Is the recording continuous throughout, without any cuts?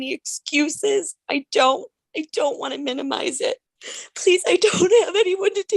no; 1 cut; at 3.7 s

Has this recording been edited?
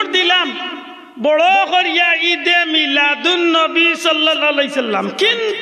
no; 0 cuts

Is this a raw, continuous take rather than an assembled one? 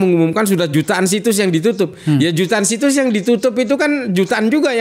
yes; 0 cuts

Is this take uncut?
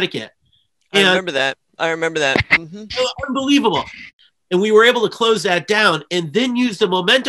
no; 1 cut; at 4.0 s

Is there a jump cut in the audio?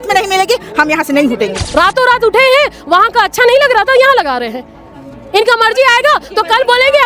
yes; 1 cut; at 1.6 s

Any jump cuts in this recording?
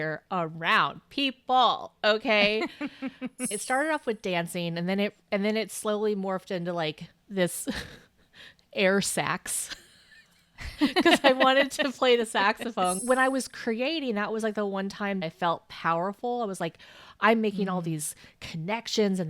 yes; 3 cuts; at 3.6 s, 13.0 s, 15.2 s

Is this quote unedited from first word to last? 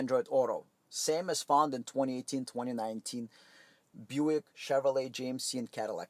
yes; 0 cuts

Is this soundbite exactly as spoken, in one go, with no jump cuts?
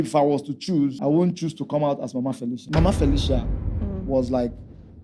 no; 2 cuts; at 1.0 s, 2.6 s

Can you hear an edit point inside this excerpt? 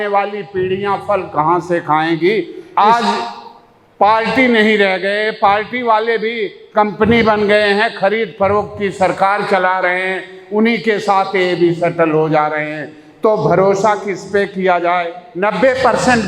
yes; 2 cuts; at 2.6 s, 15.2 s

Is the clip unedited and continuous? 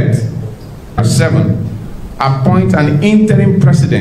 no; 1 cut; at 1.0 s

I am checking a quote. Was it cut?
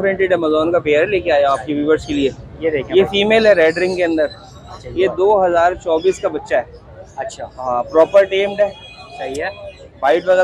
no; 0 cuts

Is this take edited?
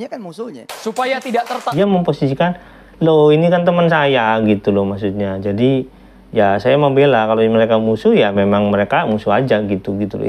yes; 1 cut; at 1.7 s

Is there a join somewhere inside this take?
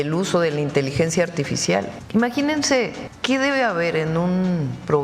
yes; 2 cuts; at 2.0 s, 3.1 s

